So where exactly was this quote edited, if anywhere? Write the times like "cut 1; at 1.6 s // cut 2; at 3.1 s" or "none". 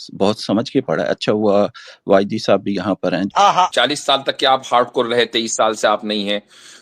cut 1; at 3.3 s